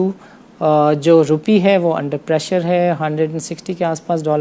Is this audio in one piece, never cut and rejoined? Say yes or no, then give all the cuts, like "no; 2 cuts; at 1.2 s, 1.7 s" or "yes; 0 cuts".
yes; 0 cuts